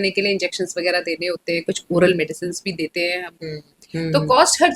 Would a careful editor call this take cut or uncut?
cut